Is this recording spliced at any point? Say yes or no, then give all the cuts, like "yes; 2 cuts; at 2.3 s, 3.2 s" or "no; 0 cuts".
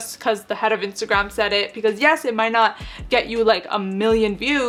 no; 0 cuts